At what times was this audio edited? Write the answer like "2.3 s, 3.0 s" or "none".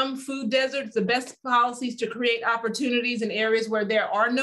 none